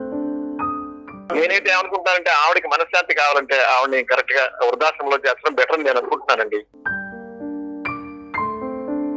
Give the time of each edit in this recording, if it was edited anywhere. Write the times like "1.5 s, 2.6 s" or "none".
1.1 s, 6.7 s